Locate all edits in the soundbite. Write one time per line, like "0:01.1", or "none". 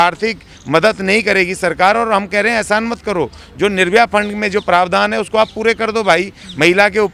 none